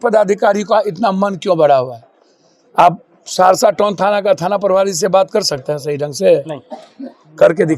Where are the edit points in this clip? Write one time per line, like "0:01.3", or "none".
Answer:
none